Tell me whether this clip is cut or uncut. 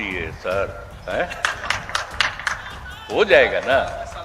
uncut